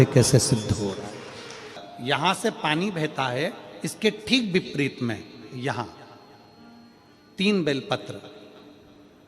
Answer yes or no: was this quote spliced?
no